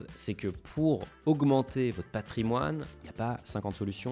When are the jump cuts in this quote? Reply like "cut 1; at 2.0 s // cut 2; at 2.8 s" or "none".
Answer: cut 1; at 1.1 s // cut 2; at 3.0 s